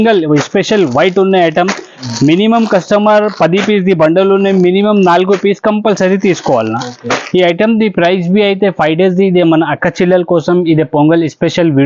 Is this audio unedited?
yes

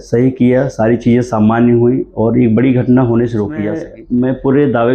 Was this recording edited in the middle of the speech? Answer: yes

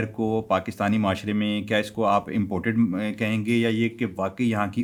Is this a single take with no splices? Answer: yes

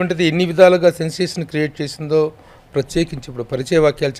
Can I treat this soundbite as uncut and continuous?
yes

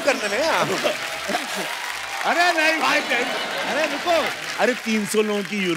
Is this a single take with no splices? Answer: yes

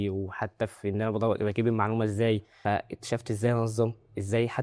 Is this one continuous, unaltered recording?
no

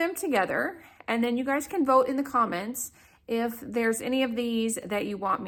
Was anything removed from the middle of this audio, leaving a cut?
no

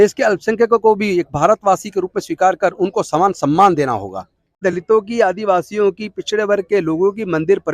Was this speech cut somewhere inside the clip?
yes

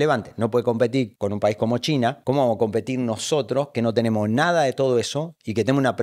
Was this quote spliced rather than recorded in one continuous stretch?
yes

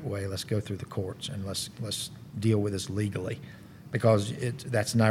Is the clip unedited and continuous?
yes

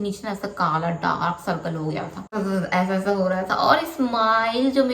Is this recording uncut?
no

